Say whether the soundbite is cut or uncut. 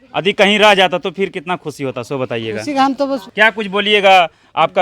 cut